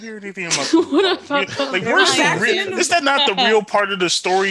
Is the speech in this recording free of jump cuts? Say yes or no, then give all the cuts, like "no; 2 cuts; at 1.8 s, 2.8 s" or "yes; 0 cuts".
yes; 0 cuts